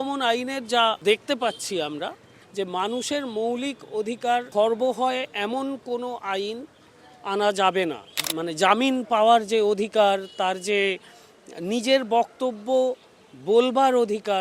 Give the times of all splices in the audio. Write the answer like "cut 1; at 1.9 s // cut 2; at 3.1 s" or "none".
cut 1; at 1.0 s // cut 2; at 2.2 s // cut 3; at 4.5 s // cut 4; at 8.1 s